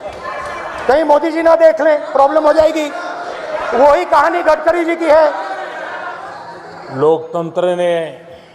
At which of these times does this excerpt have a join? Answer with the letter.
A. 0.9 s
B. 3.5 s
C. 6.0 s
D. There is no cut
C